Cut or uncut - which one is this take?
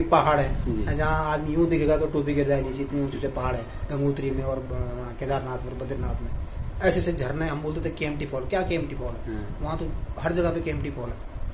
uncut